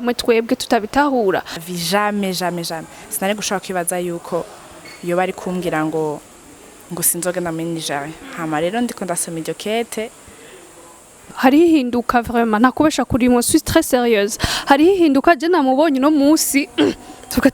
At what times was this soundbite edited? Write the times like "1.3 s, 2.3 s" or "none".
1.6 s, 11.3 s